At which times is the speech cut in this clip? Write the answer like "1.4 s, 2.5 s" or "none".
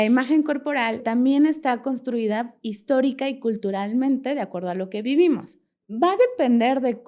1.0 s, 5.7 s